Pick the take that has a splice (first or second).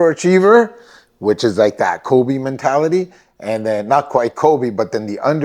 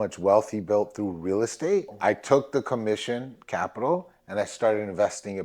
second